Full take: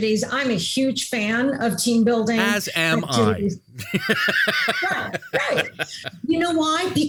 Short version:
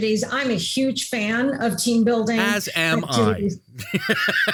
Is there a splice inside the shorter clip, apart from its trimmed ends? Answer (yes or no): no